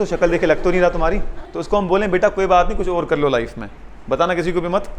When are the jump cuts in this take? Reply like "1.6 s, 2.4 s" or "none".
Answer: 1.4 s